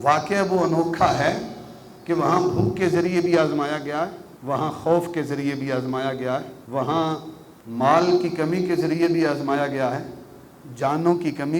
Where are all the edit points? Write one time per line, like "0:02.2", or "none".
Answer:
none